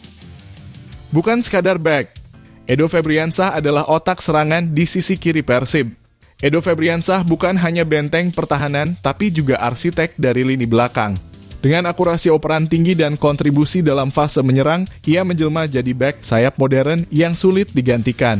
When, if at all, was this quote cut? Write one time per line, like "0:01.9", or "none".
0:01.1